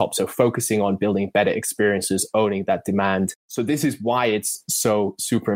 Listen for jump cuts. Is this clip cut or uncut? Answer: cut